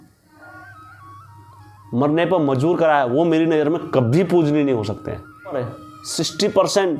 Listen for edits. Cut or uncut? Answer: cut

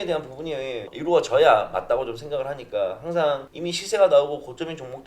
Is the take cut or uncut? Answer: cut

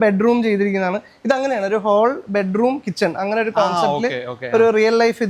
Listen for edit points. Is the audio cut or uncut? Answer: uncut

